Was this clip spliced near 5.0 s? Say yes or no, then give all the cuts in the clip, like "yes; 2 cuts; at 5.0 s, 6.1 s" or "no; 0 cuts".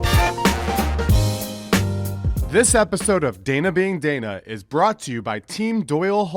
no; 1 cut; at 2.3 s